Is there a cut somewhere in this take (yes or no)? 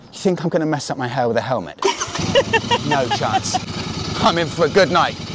yes